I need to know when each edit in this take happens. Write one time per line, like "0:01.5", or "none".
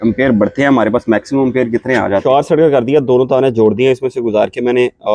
0:02.2